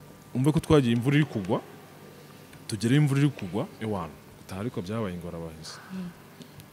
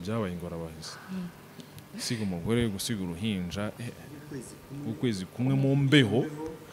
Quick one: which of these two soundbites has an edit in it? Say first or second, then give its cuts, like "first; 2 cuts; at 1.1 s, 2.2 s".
first; 1 cut; at 3.8 s